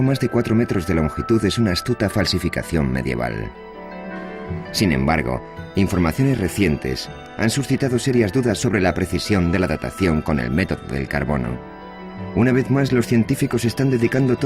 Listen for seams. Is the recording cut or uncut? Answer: uncut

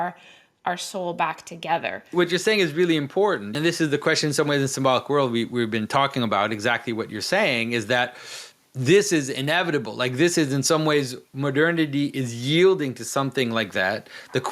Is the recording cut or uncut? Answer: cut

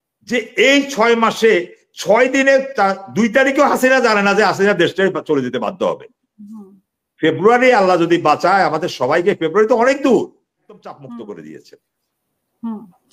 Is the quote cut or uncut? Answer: cut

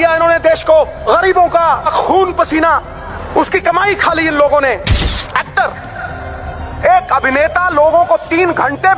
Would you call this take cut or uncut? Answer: cut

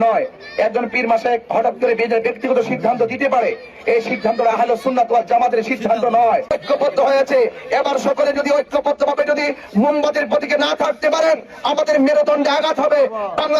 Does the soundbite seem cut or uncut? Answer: cut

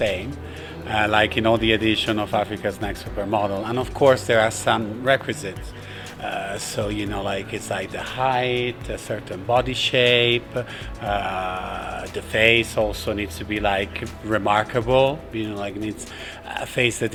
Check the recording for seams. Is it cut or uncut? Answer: uncut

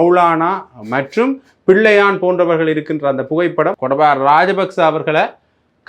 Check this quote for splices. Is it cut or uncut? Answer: cut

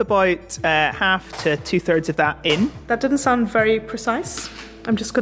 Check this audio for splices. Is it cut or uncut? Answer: cut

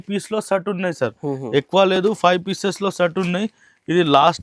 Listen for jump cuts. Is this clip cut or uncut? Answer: uncut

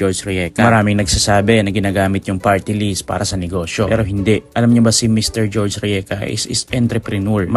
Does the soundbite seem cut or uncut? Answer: uncut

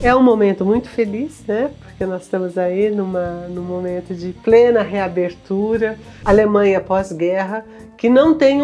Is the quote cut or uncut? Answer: cut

